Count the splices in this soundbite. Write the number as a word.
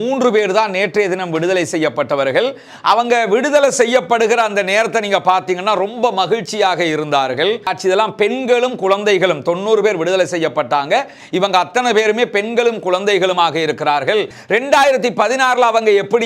two